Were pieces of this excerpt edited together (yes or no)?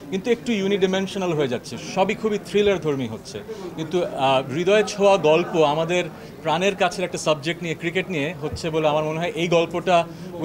no